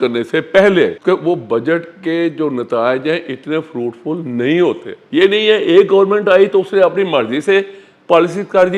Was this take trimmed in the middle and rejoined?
yes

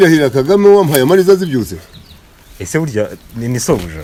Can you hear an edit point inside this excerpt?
no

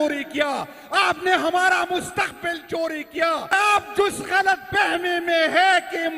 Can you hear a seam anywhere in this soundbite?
yes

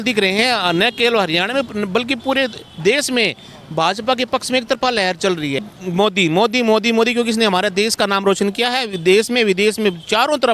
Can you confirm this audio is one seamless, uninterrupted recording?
no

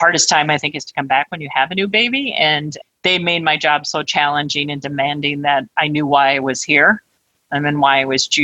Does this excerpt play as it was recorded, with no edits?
yes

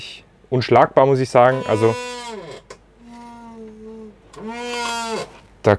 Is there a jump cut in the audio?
no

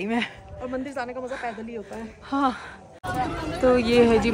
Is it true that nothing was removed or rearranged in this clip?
no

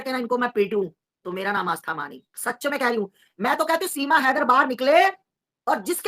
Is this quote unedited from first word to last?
no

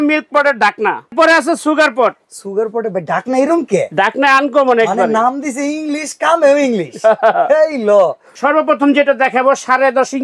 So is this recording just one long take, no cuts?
no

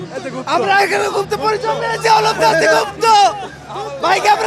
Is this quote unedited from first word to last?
yes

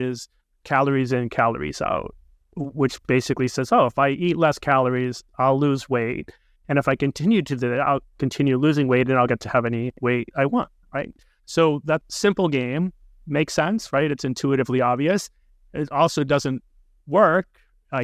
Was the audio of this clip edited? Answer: yes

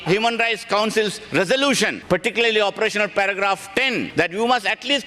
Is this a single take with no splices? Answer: no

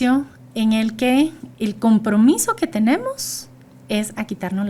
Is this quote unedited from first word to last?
yes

